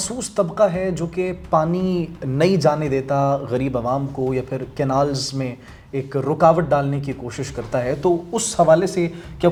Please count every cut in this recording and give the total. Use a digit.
0